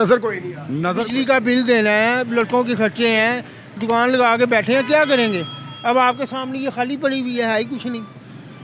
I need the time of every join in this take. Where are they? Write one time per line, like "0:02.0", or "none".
0:00.9